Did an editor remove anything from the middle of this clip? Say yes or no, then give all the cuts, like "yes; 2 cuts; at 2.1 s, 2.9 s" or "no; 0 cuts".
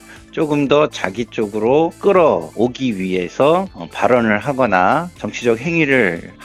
no; 0 cuts